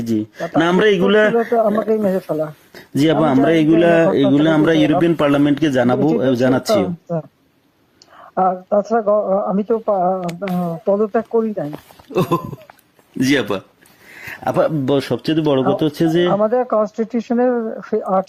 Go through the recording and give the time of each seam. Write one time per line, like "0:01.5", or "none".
none

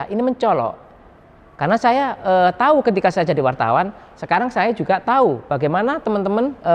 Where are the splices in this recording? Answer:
none

